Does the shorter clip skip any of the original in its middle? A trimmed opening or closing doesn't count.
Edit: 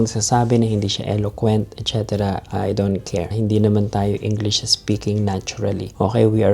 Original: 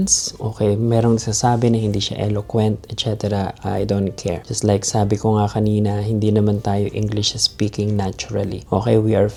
yes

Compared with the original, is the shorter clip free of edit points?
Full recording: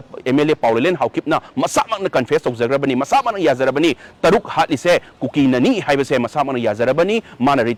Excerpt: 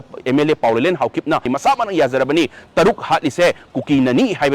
no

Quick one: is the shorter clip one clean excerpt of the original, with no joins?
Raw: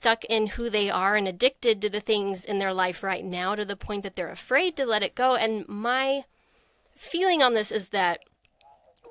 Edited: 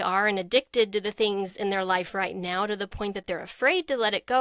yes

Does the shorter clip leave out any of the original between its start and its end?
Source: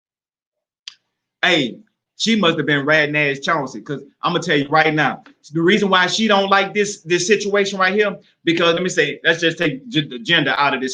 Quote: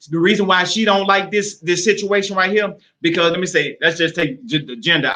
no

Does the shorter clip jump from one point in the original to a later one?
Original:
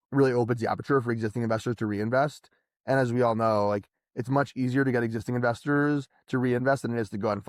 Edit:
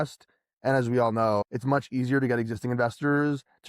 yes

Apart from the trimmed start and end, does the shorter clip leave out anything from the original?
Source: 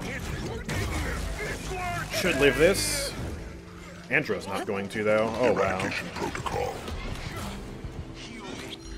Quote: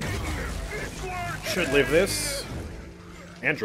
no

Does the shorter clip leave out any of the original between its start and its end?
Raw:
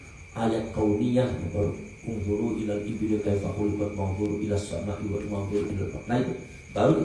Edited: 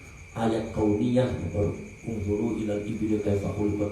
no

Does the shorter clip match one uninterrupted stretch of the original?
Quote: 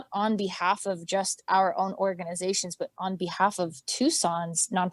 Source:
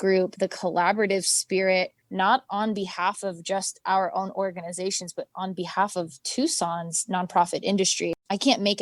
yes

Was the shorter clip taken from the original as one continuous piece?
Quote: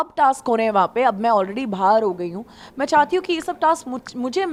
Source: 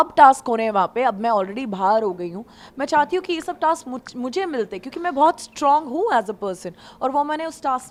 yes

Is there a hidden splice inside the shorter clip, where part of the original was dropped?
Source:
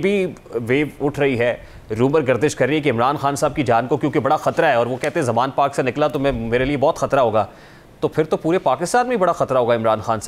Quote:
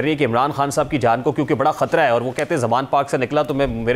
no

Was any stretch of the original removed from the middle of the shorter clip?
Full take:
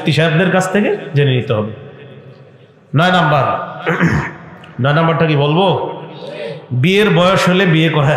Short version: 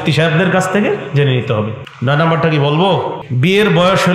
yes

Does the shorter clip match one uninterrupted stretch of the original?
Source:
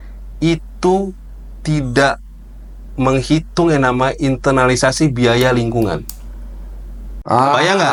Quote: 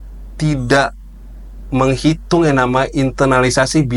yes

